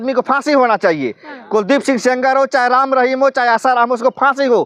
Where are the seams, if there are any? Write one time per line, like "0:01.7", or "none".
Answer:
none